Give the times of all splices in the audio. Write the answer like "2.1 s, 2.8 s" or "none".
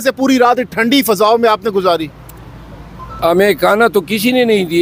none